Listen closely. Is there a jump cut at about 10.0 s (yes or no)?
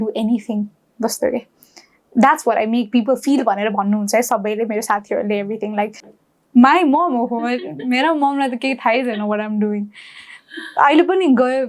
no